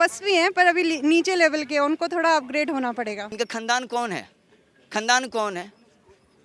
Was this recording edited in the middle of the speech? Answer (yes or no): yes